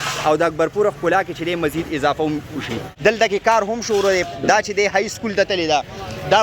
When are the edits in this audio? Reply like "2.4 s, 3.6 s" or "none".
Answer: 2.9 s